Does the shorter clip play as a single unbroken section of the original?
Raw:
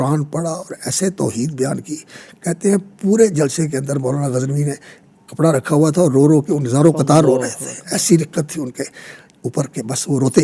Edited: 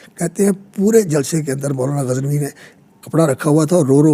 yes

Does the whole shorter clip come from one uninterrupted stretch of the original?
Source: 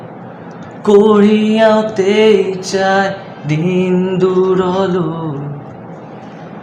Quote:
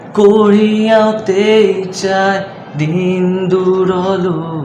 yes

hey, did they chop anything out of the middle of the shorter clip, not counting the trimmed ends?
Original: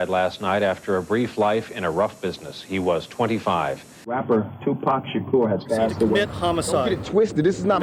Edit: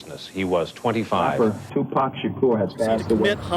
yes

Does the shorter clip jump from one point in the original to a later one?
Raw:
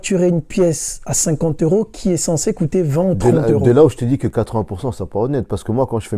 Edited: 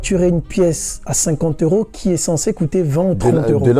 no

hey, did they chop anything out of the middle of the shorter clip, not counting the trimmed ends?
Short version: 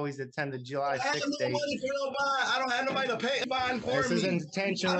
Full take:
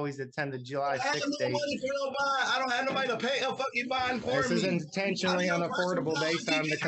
yes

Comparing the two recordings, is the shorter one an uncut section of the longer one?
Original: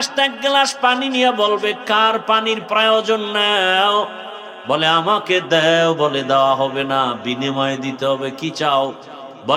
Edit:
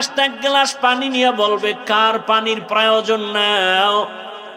yes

